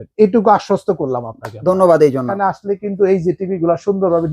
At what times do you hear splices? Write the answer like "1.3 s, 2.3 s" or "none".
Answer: 2.3 s